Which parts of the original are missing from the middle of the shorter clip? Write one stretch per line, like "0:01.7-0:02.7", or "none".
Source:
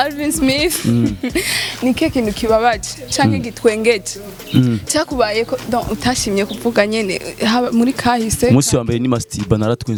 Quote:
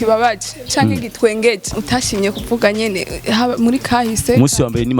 0:04.2-0:05.9